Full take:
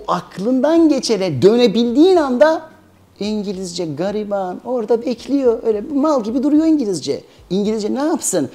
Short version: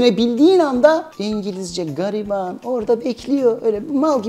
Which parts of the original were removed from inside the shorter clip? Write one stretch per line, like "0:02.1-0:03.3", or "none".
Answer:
0:02.7-0:03.1